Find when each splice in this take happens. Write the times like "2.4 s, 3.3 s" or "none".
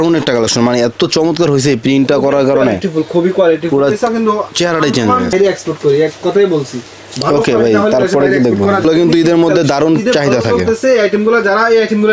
5.3 s, 8.8 s

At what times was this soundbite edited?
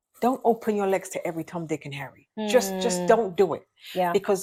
none

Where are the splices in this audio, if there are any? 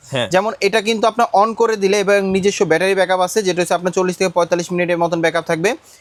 none

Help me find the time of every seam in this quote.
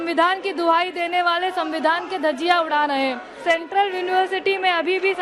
3.3 s

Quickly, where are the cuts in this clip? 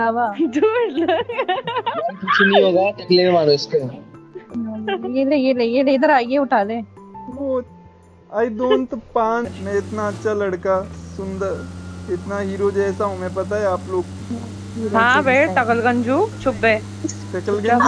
9.5 s, 14.2 s

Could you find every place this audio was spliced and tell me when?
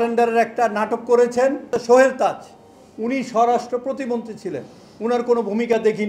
1.7 s

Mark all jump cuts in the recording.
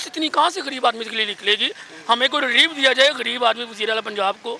none

